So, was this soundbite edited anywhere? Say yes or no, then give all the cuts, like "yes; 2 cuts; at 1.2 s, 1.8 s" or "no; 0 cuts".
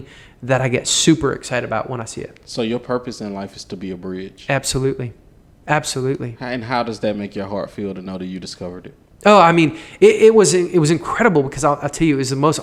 no; 0 cuts